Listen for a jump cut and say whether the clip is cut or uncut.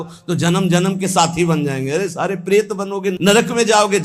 uncut